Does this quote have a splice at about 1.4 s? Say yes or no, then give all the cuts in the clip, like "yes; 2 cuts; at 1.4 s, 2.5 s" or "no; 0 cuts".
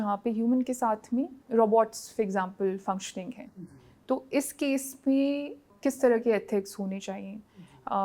yes; 2 cuts; at 1.4 s, 5.7 s